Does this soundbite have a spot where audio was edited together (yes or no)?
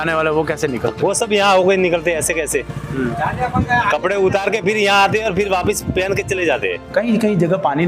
yes